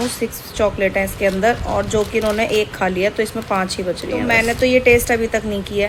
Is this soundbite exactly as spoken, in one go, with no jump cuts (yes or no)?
yes